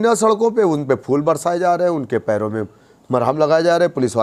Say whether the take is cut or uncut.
uncut